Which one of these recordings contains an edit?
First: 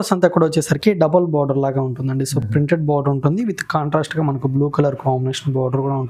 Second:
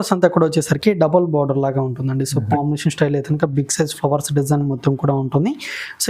second; 1 cut; at 2.5 s

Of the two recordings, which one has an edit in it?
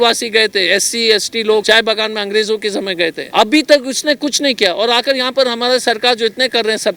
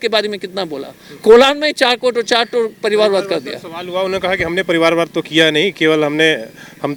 first; 2 cuts; at 1.6 s, 3.2 s

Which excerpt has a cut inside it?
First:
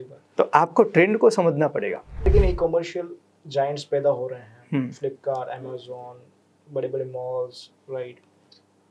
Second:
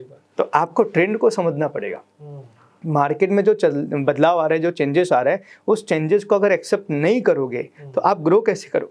first; 1 cut; at 2.3 s

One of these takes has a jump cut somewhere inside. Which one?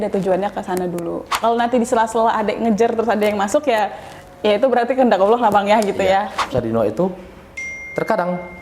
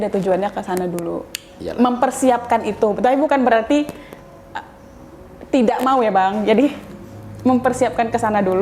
first; 2 cuts; at 1.3 s, 6.5 s

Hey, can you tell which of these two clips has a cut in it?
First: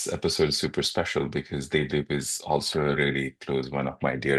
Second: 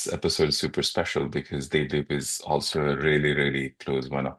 first; 1 cut; at 3.0 s

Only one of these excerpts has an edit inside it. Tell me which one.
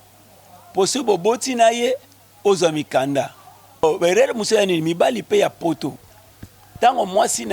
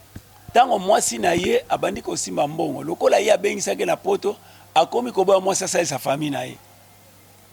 first; 1 cut; at 3.8 s

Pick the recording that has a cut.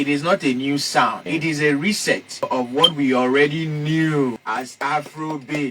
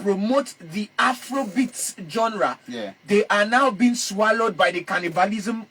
first; 3 cuts; at 1.2 s, 2.5 s, 4.4 s

